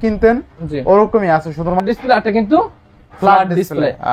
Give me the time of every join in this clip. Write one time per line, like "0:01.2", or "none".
0:01.7